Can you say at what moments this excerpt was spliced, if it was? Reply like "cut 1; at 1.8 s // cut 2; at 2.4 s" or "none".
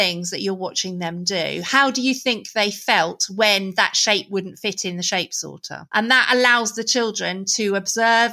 none